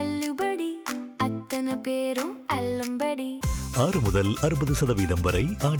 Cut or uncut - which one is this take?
uncut